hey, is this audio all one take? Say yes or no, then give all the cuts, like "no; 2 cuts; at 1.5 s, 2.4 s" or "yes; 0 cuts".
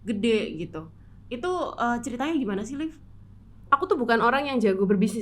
no; 1 cut; at 3.6 s